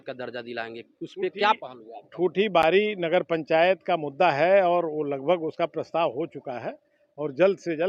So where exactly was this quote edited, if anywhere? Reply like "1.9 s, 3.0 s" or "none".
none